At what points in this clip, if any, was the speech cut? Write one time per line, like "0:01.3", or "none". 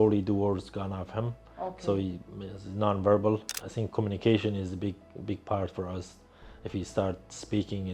0:03.6